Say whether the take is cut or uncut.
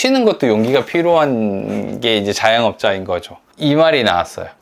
cut